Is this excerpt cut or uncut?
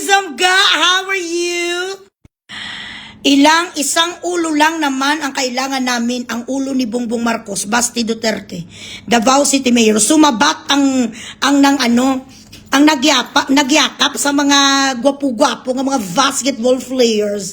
uncut